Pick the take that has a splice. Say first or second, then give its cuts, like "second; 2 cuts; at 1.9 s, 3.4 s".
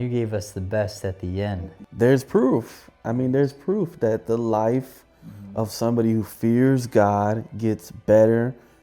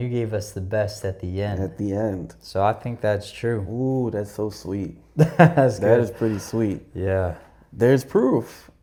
first; 1 cut; at 1.6 s